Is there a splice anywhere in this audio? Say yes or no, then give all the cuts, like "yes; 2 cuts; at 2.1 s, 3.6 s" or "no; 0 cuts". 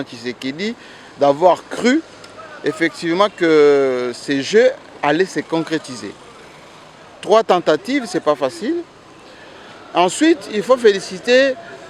no; 0 cuts